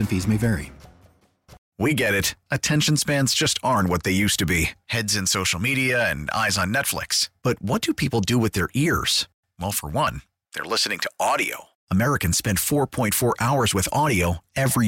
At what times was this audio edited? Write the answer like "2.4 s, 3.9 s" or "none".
1.6 s